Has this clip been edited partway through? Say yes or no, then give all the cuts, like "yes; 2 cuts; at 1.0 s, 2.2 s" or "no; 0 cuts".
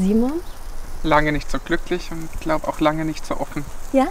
no; 0 cuts